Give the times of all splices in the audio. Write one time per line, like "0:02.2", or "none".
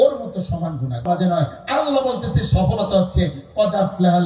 0:01.1